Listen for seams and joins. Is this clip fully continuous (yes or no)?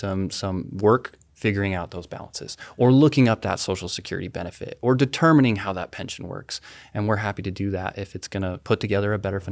no